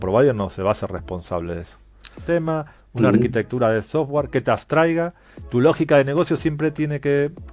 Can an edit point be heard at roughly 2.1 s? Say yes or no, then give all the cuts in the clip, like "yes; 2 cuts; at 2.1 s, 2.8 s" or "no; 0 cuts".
yes; 1 cut; at 2.1 s